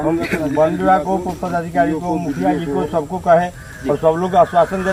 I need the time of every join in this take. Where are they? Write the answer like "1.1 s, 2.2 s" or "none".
none